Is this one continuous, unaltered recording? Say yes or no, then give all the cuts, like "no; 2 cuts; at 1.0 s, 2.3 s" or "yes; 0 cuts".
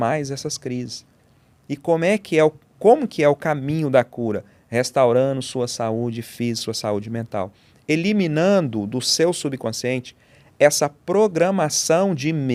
yes; 0 cuts